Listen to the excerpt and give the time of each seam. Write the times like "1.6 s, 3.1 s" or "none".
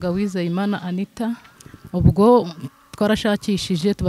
1.5 s